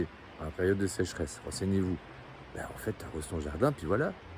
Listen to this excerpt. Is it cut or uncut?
uncut